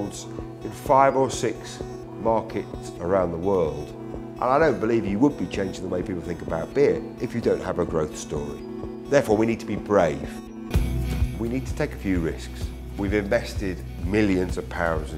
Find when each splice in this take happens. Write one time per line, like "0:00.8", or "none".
0:10.5